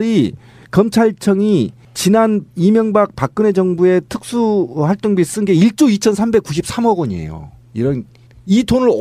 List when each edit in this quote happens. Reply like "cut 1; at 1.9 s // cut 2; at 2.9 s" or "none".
cut 1; at 7.0 s

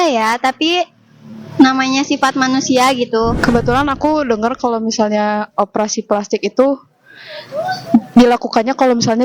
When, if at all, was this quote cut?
cut 1; at 3.4 s

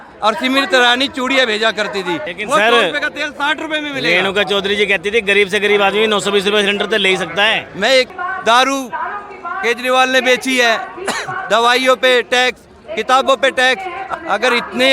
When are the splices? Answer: cut 1; at 2.3 s // cut 2; at 8.1 s // cut 3; at 13.9 s

